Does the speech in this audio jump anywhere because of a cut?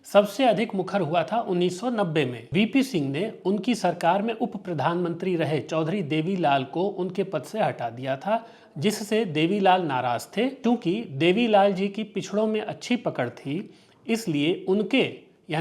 yes; 2 cuts; at 2.4 s, 10.6 s

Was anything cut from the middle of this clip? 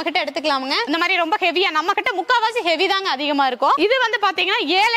yes; 2 cuts; at 0.9 s, 3.8 s

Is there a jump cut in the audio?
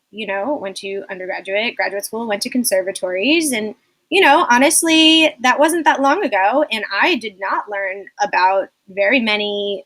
no; 0 cuts

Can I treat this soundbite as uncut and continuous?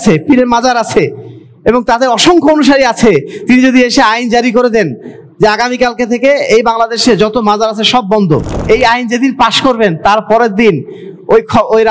no; 1 cut; at 8.5 s

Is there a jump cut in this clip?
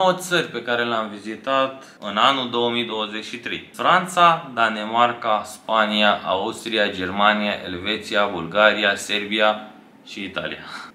no; 0 cuts

